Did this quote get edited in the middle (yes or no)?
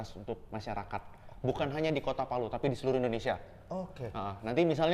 no